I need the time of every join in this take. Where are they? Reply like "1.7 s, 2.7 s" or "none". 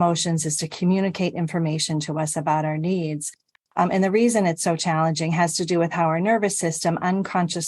3.5 s